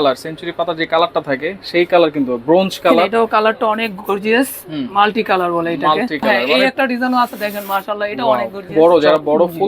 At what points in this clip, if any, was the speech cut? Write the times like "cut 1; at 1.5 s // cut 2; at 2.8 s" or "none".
cut 1; at 3.1 s // cut 2; at 6.5 s // cut 3; at 8.6 s